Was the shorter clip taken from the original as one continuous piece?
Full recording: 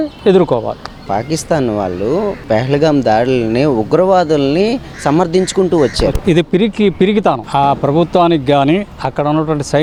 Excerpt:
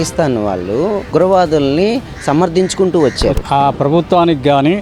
no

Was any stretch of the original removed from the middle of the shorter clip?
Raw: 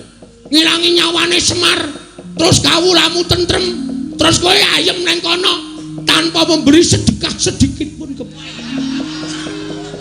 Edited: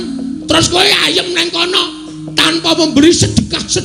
no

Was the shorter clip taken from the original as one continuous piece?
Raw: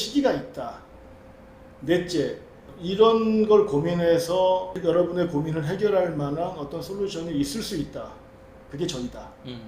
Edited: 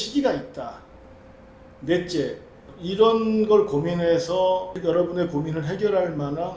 yes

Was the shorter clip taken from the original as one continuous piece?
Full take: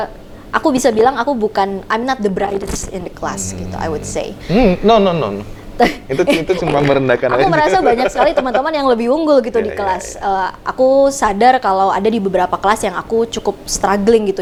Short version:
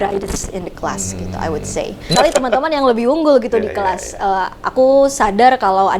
no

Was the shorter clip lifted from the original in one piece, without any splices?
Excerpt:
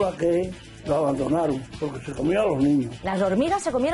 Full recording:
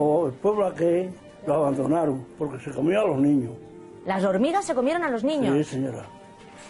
no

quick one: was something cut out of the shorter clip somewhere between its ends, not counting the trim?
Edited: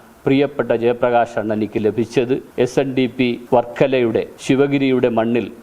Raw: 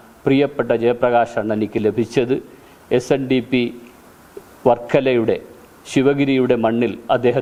yes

